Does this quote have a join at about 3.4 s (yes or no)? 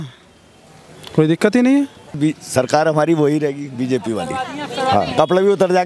no